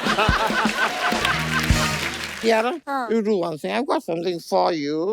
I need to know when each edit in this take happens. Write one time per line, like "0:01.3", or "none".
0:02.2
0:02.8